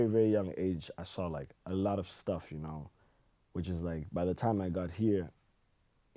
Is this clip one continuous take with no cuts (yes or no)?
yes